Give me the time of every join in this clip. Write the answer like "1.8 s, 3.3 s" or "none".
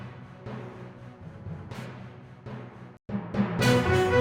none